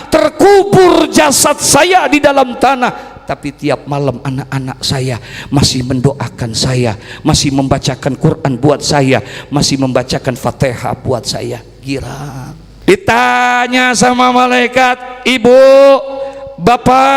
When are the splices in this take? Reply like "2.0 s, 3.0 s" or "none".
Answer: 12.6 s